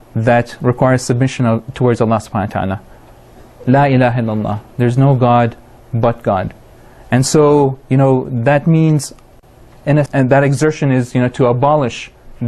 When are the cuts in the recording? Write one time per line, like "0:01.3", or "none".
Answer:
none